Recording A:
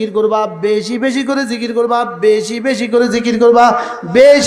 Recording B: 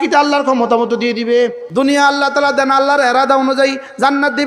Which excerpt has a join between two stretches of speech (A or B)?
B